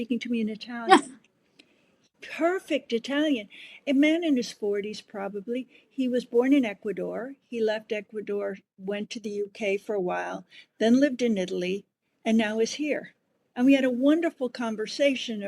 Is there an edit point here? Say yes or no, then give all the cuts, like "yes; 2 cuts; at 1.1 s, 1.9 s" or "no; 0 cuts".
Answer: yes; 2 cuts; at 2.1 s, 3.8 s